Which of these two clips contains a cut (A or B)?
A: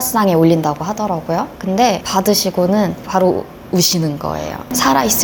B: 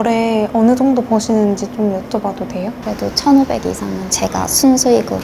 B